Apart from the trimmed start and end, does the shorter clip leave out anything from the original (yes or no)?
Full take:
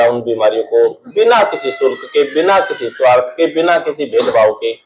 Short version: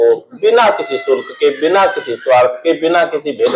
no